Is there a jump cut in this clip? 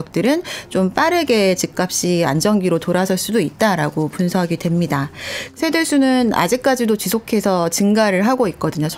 yes; 1 cut; at 5.4 s

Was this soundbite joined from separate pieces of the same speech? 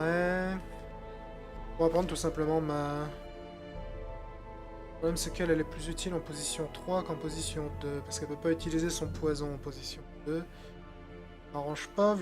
yes; 1 cut; at 1.9 s

